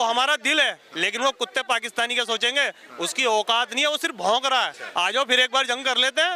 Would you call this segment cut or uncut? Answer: cut